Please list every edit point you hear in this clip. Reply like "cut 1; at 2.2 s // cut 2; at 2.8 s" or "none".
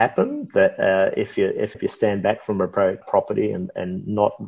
cut 1; at 1.7 s // cut 2; at 3.0 s